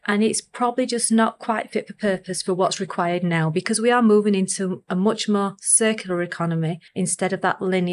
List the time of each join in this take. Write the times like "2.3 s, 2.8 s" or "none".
6.8 s